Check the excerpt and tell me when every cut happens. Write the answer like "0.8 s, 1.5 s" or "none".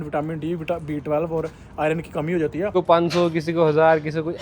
2.7 s